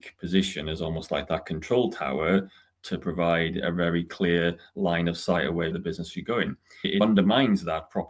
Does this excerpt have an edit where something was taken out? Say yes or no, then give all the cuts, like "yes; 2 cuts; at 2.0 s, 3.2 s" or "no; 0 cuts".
no; 0 cuts